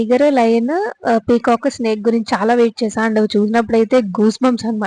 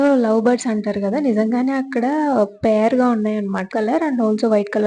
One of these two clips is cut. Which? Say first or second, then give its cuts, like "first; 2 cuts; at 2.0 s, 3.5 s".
second; 1 cut; at 3.7 s